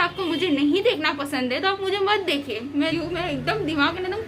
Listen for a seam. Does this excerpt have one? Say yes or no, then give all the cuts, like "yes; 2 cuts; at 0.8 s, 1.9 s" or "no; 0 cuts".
yes; 1 cut; at 2.9 s